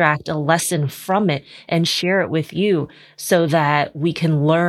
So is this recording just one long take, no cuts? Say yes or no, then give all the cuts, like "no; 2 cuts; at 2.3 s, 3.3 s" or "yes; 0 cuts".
yes; 0 cuts